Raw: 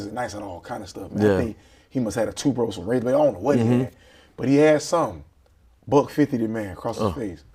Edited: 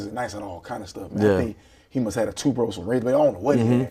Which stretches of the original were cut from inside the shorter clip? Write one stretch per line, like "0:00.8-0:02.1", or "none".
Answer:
none